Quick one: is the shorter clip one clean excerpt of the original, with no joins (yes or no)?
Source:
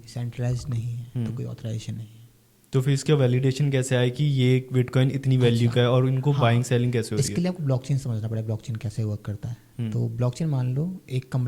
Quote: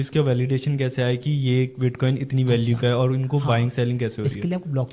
yes